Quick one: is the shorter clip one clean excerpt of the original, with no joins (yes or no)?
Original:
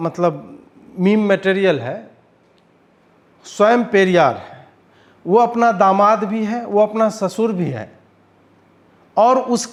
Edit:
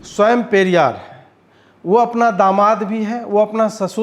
yes